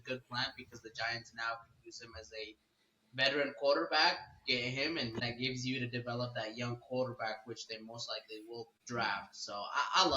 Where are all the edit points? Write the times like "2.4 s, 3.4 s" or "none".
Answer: 5.2 s, 8.8 s